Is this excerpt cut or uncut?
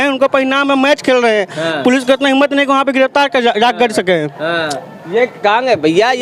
uncut